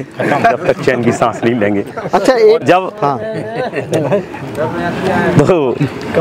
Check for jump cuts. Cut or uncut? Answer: uncut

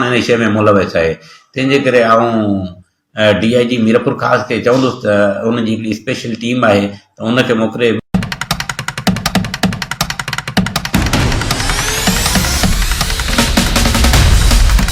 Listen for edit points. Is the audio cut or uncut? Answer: cut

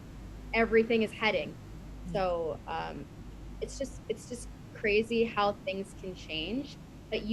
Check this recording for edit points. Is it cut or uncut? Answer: uncut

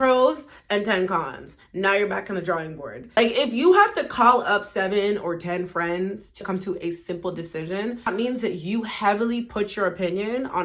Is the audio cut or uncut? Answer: cut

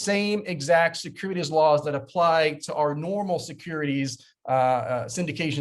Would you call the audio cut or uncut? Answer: uncut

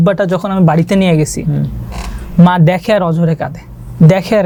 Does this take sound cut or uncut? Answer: uncut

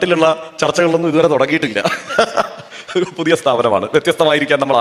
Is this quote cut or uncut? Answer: uncut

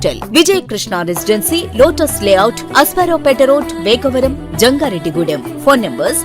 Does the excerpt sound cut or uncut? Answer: uncut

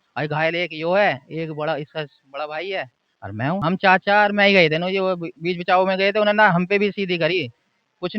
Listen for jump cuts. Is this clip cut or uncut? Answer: cut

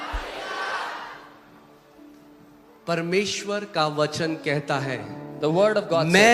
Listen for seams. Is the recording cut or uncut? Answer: uncut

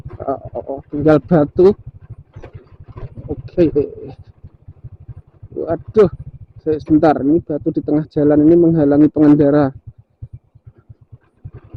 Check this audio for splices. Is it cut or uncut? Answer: uncut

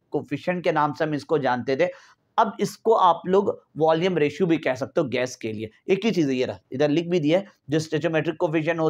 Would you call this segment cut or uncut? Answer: uncut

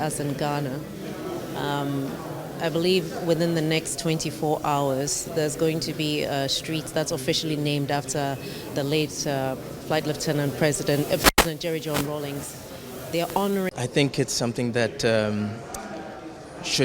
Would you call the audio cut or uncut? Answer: cut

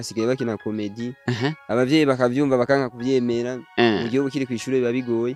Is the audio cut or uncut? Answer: uncut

